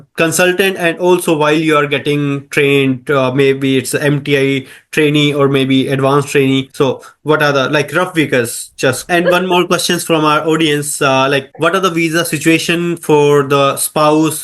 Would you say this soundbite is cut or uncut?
cut